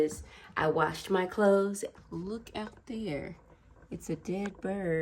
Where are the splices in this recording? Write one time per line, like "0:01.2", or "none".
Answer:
0:01.9

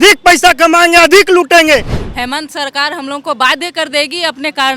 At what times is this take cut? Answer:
0:02.0

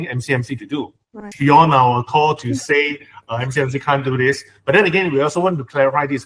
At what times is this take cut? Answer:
0:01.2

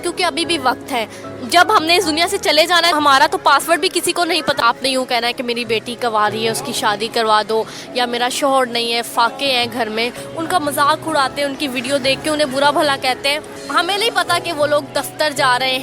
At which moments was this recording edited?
0:02.9
0:04.6
0:10.2
0:13.5

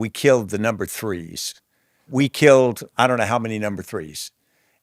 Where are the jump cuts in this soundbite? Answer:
0:02.1

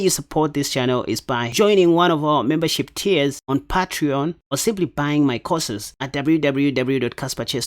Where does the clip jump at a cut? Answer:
0:01.5
0:05.8

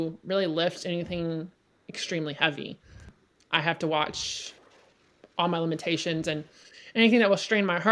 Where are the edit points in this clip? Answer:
none

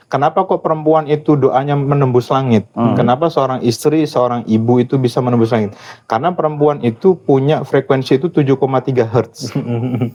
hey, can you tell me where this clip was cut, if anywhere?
none

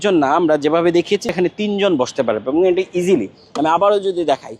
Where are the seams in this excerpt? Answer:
0:01.3

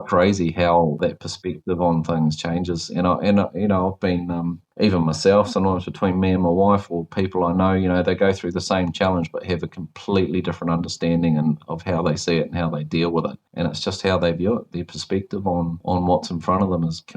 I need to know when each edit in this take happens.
0:01.0

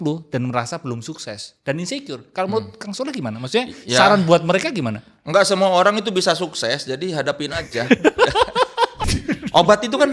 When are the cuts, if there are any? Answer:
0:09.0

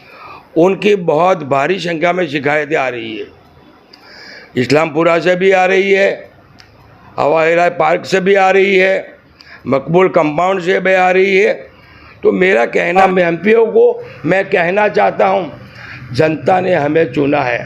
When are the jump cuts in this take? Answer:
0:13.0

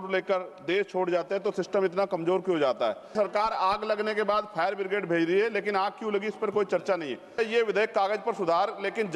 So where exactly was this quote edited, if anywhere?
0:03.1
0:07.4

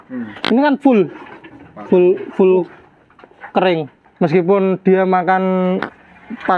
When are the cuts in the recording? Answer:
0:04.0

